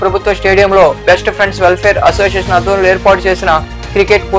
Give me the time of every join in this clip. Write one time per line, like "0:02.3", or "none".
none